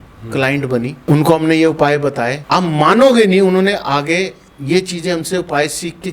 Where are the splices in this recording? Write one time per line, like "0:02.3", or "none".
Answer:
0:01.0
0:02.4